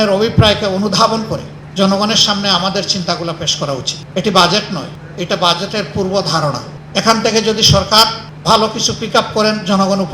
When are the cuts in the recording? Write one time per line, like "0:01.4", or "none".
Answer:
0:01.6
0:04.0
0:05.0
0:06.7
0:08.3